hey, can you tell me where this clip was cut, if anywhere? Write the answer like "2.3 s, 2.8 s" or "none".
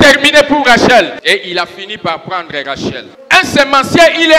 1.2 s, 3.1 s